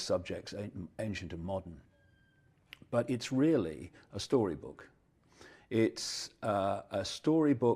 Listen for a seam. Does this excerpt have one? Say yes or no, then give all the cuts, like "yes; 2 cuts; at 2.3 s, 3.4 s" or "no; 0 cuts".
yes; 1 cut; at 1.2 s